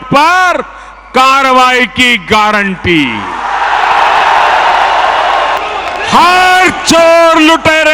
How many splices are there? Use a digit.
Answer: 1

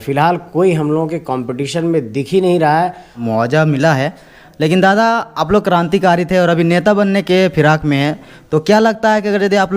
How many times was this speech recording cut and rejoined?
1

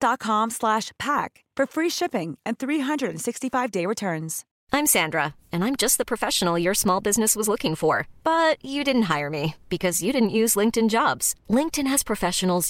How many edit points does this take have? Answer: 1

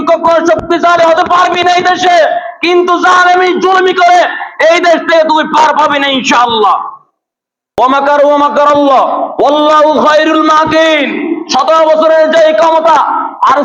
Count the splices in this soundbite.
1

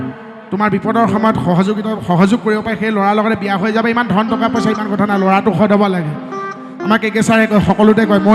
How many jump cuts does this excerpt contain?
0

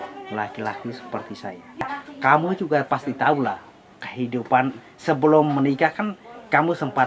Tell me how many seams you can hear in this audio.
1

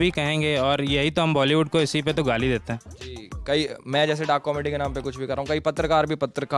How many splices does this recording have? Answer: 0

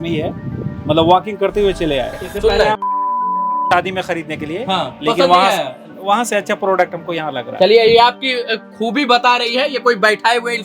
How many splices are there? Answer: 1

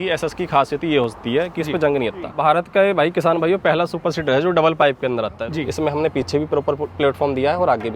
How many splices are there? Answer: 2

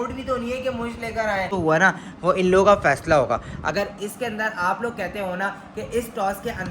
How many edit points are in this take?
1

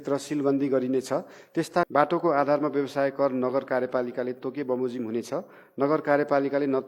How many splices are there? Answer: 1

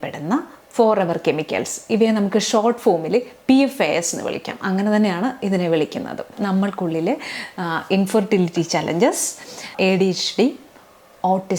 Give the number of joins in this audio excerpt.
1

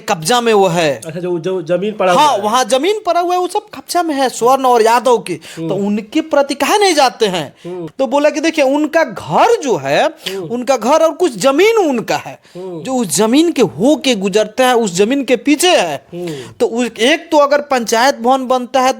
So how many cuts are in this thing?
1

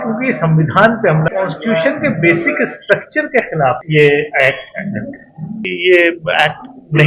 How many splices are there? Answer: 3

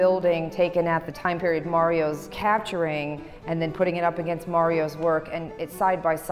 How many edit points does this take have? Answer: 2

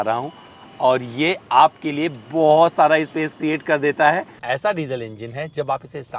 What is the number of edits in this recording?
1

